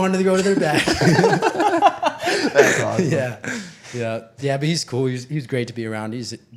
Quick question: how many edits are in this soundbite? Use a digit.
0